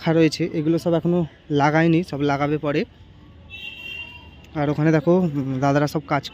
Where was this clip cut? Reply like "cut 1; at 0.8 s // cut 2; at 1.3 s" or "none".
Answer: none